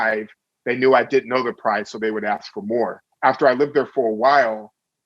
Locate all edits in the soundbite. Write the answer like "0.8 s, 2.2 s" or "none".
3.0 s